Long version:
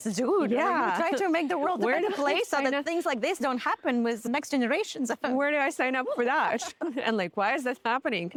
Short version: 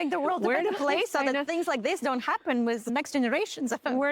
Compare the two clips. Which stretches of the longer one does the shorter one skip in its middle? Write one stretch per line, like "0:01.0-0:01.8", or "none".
none